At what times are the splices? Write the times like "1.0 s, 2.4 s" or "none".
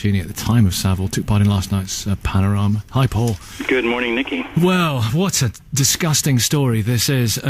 5.0 s